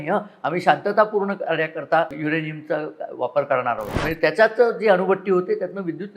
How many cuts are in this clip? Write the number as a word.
two